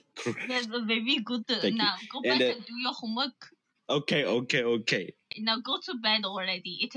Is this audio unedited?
no; 1 cut; at 5.3 s

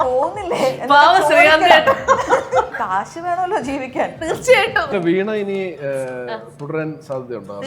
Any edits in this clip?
yes; 2 cuts; at 2.7 s, 4.9 s

